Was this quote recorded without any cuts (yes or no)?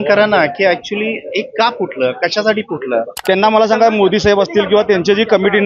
no